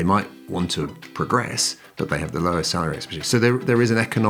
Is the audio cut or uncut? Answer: uncut